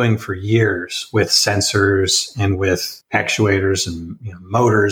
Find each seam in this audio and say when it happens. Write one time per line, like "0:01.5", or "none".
0:03.0